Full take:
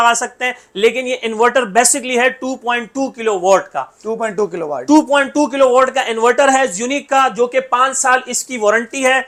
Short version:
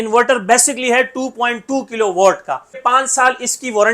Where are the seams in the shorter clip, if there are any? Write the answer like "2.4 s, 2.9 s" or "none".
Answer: 2.8 s